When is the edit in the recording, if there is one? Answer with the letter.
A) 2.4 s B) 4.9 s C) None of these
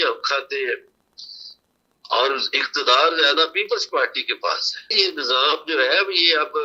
B